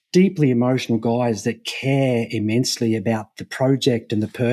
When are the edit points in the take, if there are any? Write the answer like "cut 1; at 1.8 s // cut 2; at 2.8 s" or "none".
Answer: none